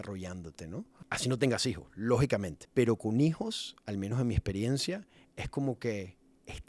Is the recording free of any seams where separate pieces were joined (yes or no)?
no